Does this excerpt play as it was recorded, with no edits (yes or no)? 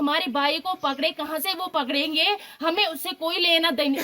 yes